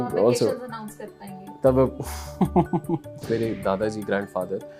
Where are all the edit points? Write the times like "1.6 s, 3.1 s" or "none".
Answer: 3.3 s